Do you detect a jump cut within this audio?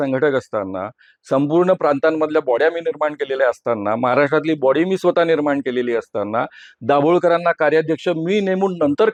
no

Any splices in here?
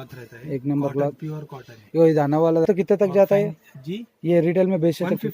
yes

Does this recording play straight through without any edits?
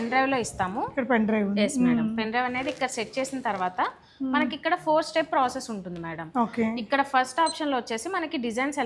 yes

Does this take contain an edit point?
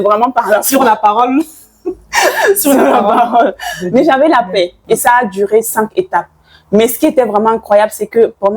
yes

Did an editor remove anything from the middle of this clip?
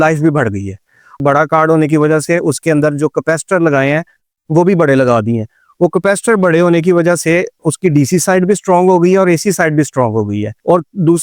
yes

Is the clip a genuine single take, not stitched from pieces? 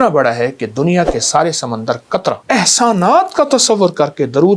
no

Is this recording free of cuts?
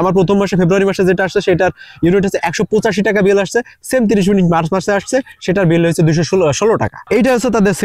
no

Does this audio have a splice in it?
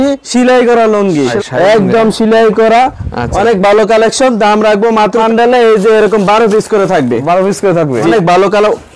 yes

